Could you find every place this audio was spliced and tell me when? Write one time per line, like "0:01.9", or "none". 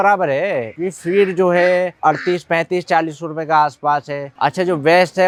none